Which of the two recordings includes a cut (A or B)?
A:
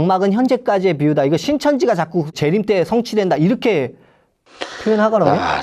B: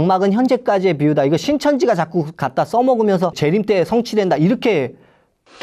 A